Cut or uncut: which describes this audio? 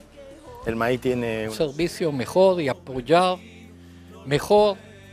cut